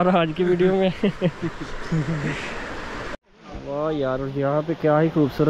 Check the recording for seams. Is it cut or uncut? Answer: cut